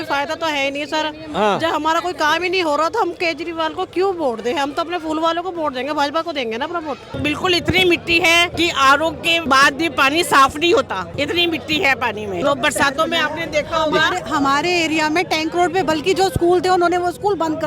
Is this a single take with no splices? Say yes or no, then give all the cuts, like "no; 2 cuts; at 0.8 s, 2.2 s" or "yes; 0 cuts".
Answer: no; 5 cuts; at 7.2 s, 8.5 s, 9.4 s, 11.1 s, 12.4 s